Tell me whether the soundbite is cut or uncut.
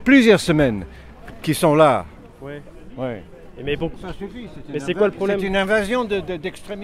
uncut